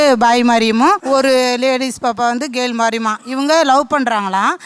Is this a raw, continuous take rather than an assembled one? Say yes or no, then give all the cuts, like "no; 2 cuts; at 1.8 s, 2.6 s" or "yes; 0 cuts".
no; 1 cut; at 1.0 s